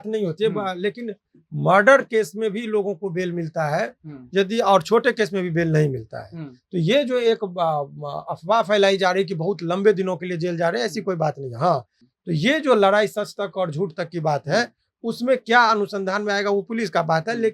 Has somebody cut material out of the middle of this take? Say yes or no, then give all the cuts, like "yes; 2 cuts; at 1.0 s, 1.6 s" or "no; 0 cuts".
yes; 1 cut; at 12.0 s